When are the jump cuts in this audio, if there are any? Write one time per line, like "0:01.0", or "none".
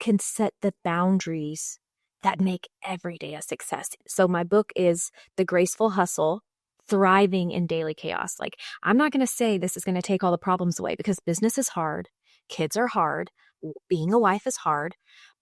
0:04.1